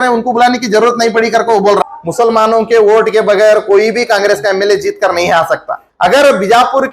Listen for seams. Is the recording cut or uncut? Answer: cut